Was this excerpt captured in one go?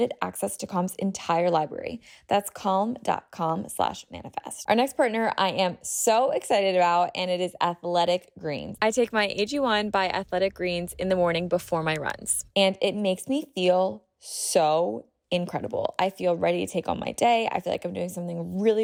yes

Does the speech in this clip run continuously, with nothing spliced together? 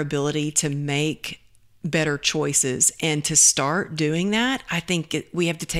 yes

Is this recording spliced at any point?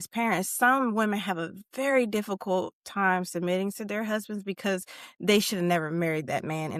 no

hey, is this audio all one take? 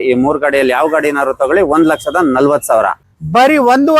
no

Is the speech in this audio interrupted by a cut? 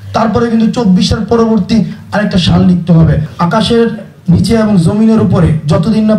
yes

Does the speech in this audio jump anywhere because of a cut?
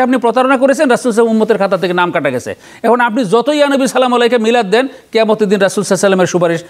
no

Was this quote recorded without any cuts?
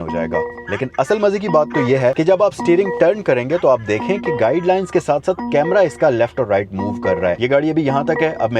no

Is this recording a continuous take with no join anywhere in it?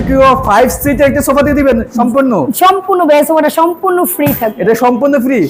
yes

